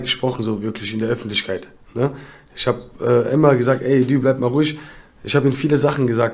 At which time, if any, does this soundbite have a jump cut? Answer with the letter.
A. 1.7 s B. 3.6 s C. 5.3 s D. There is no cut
D